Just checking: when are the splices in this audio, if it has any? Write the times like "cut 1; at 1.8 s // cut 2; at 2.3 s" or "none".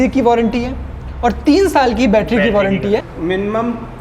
cut 1; at 3.1 s